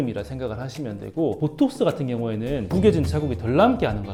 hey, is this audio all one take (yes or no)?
yes